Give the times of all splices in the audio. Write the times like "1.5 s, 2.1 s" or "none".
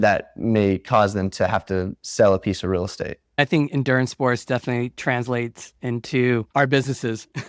3.4 s, 6.5 s